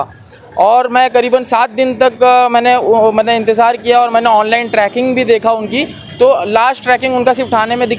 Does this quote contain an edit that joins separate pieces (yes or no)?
no